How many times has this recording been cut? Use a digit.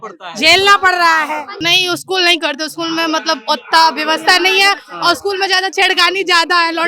1